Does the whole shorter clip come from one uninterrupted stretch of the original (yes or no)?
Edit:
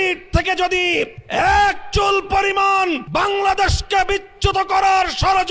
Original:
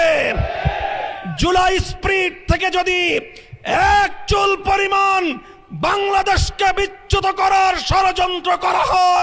no